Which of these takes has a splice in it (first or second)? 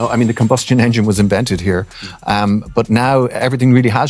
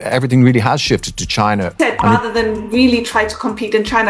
second